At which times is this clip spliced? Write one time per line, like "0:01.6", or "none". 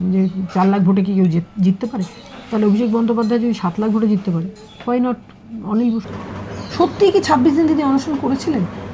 0:06.2